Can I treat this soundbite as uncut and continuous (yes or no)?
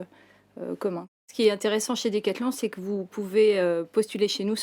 no